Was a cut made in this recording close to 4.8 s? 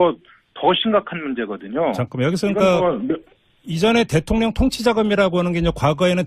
yes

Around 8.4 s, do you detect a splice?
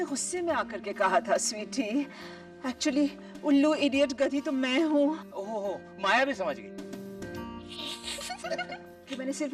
yes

